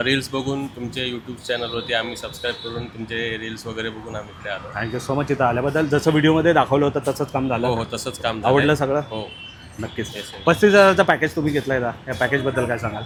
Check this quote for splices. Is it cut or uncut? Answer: uncut